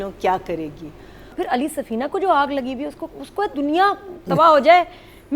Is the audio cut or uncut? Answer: cut